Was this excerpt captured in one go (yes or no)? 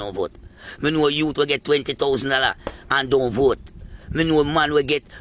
yes